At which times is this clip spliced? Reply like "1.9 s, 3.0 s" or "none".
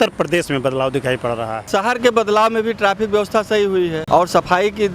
1.6 s, 4.0 s